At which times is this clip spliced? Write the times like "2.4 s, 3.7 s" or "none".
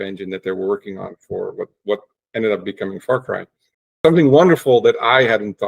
4.0 s